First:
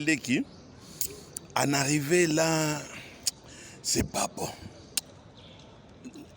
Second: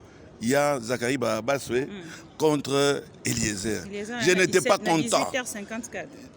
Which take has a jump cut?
first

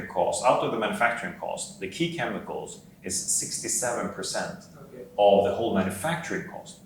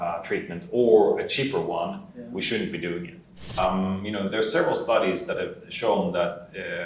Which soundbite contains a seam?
second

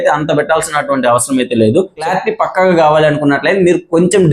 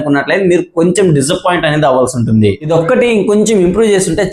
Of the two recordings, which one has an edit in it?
first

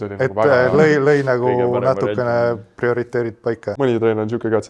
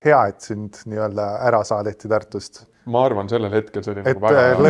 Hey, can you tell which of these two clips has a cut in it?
first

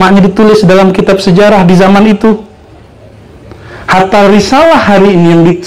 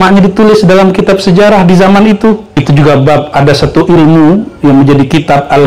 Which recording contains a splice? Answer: second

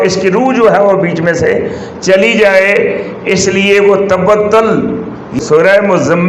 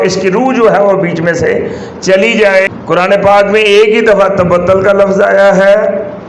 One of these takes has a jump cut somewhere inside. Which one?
second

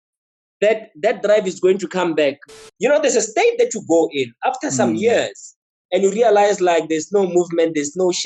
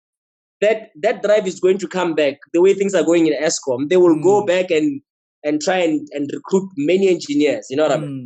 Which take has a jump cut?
first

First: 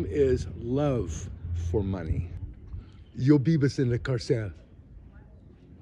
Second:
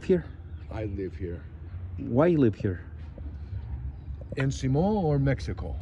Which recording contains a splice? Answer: first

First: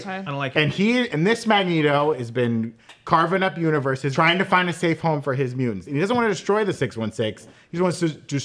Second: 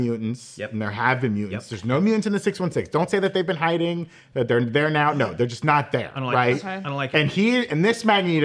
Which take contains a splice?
first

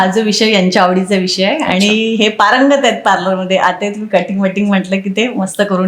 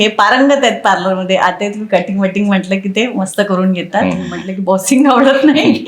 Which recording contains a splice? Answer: second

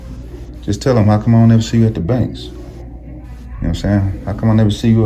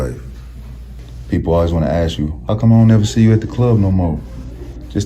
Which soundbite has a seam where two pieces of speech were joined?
second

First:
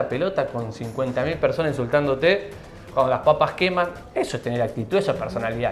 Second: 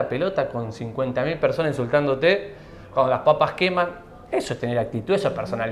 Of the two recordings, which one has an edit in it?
first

